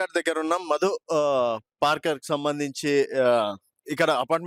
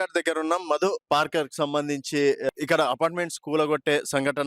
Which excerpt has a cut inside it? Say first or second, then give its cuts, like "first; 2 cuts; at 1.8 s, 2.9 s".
second; 2 cuts; at 1.0 s, 2.5 s